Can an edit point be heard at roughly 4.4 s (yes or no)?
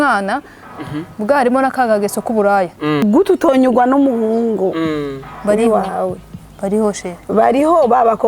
no